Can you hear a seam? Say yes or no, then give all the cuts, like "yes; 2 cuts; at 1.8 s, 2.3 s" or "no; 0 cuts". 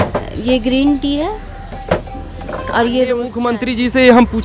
yes; 1 cut; at 3.5 s